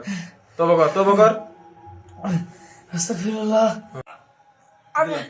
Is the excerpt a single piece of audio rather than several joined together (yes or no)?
no